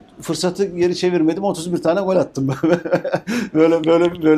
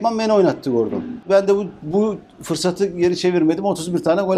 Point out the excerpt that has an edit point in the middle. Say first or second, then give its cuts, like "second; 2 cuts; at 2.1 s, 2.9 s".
second; 1 cut; at 1.2 s